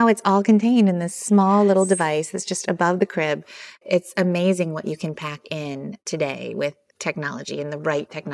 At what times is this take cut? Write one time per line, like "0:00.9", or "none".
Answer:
0:03.8
0:06.0